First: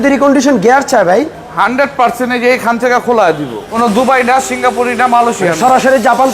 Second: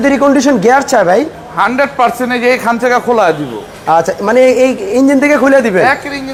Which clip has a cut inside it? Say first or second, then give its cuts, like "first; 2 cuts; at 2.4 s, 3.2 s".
first; 1 cut; at 3.6 s